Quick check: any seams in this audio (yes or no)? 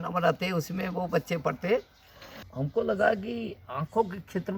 yes